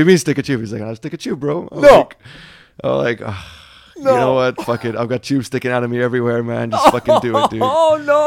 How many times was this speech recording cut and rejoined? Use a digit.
0